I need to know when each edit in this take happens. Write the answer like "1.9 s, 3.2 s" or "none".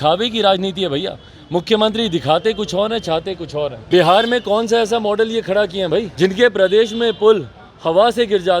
3.8 s, 6.1 s